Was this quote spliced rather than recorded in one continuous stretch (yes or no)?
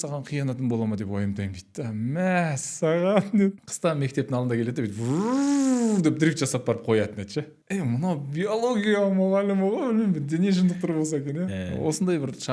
yes